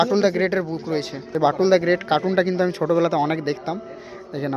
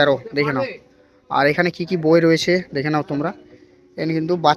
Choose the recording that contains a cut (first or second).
first